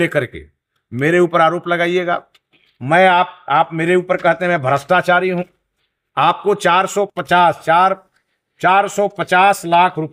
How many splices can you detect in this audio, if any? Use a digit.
0